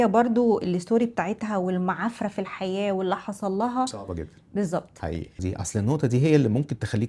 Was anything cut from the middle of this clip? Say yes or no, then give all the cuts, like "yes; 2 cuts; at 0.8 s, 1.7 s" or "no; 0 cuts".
yes; 1 cut; at 5.3 s